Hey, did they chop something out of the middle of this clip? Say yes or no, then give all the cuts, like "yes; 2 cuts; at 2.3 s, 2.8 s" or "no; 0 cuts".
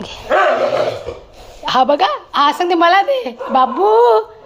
no; 0 cuts